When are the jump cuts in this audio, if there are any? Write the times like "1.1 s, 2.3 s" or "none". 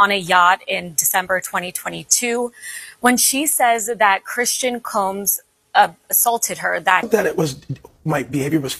7.0 s